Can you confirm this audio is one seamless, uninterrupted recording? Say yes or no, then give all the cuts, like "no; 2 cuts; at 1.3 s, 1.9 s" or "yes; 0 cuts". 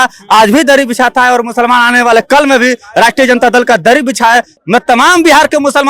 no; 1 cut; at 4.5 s